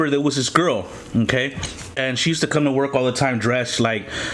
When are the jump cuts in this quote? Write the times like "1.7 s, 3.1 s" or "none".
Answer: 2.0 s